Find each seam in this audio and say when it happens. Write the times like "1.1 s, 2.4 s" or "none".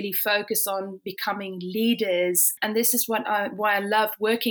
2.5 s